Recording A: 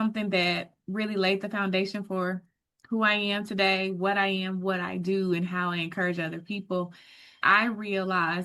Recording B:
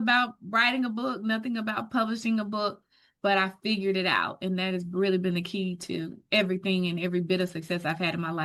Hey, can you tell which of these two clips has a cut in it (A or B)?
A